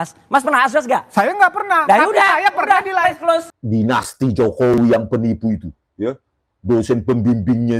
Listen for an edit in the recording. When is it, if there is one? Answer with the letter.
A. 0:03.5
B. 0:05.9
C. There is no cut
A